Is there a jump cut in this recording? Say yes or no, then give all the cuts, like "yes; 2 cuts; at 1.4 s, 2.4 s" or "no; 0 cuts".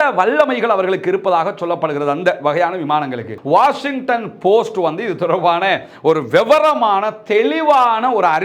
yes; 1 cut; at 3.3 s